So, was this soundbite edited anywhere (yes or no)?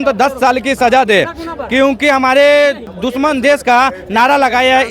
yes